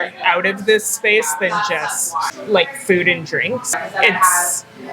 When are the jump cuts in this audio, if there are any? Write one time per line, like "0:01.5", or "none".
0:02.3
0:03.8